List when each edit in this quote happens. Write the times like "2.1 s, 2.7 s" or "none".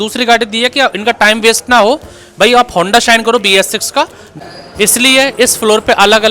4.2 s